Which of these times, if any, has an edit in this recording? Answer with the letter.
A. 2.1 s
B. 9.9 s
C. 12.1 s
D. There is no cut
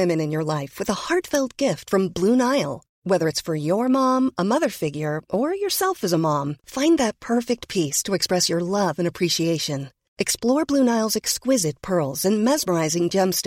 D